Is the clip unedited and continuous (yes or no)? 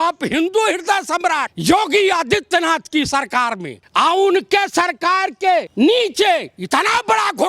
no